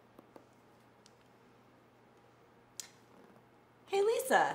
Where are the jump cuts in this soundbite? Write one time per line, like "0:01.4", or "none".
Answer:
0:03.3